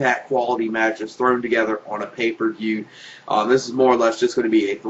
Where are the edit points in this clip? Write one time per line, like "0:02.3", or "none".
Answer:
0:01.4